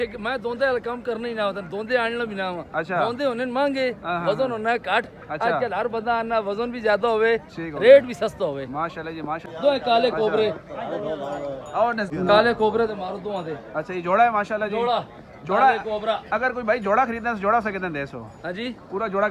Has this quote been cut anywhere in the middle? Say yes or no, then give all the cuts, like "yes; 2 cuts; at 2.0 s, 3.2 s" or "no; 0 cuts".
yes; 2 cuts; at 9.4 s, 12.1 s